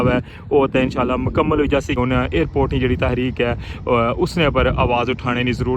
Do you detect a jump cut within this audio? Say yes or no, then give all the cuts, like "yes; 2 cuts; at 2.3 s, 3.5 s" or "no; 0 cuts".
yes; 1 cut; at 2.0 s